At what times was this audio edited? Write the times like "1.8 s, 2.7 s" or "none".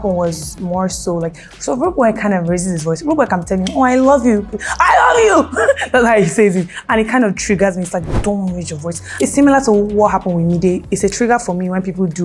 9.2 s